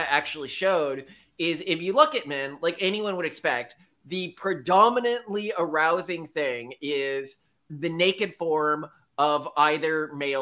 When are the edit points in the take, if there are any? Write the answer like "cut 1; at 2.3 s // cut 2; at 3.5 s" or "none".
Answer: none

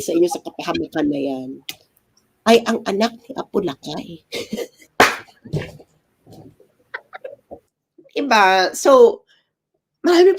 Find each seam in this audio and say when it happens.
cut 1; at 7.7 s

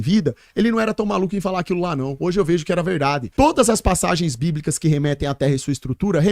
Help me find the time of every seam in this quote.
cut 1; at 3.3 s

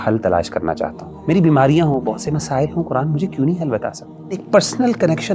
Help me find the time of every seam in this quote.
cut 1; at 1.1 s // cut 2; at 4.4 s

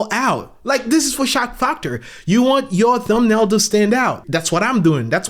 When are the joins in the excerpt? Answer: none

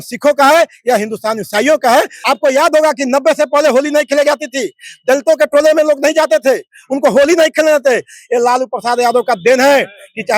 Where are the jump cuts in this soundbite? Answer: cut 1; at 2.2 s

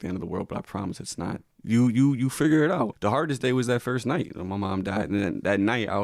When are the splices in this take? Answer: cut 1; at 1.5 s // cut 2; at 3.0 s

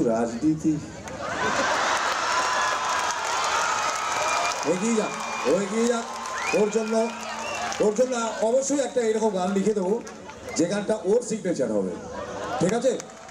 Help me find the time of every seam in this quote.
none

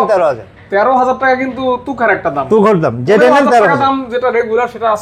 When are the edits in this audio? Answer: none

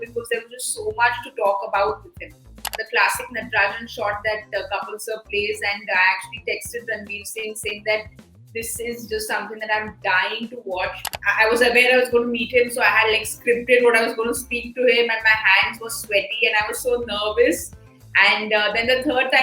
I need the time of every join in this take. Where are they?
cut 1; at 2.7 s // cut 2; at 11.1 s

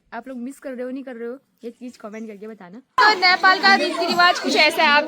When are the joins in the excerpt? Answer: cut 1; at 3.0 s

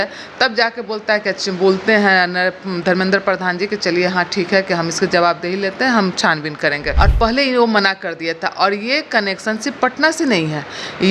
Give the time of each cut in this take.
cut 1; at 6.9 s

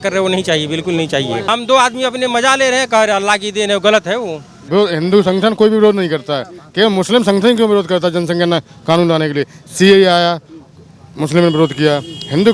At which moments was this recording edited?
cut 1; at 1.5 s // cut 2; at 4.5 s

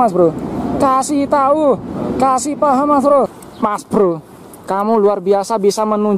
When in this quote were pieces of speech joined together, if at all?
cut 1; at 3.4 s

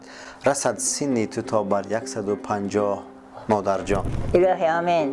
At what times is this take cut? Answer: cut 1; at 4.1 s

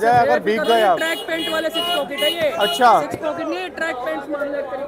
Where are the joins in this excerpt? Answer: none

